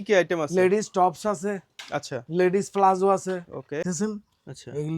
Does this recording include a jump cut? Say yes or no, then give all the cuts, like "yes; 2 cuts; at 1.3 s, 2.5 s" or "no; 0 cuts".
yes; 1 cut; at 3.8 s